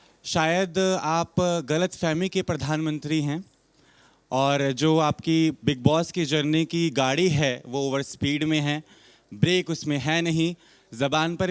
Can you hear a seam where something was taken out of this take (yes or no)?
no